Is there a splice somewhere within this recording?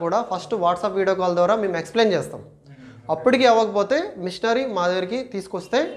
no; 0 cuts

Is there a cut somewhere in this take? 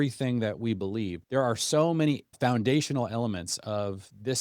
yes; 2 cuts; at 1.2 s, 2.3 s

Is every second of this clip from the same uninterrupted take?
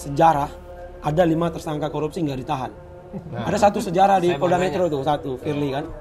yes; 0 cuts

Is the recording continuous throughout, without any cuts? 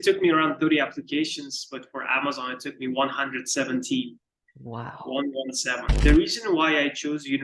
no; 1 cut; at 5.8 s

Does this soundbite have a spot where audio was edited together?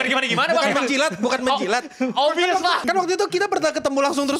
yes; 1 cut; at 2.8 s

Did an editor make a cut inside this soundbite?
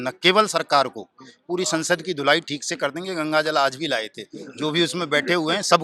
no; 0 cuts

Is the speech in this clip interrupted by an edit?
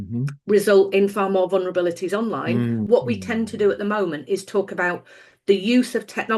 yes; 1 cut; at 2.8 s

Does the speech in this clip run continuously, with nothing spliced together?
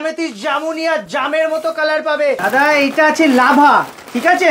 no; 1 cut; at 2.4 s

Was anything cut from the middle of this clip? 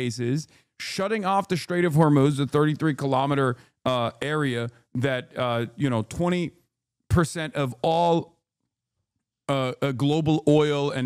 no; 0 cuts

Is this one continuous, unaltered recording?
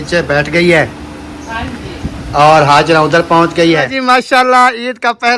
no; 1 cut; at 3.9 s

